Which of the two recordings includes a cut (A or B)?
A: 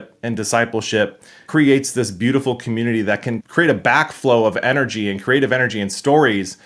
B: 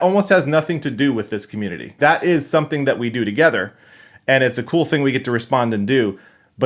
B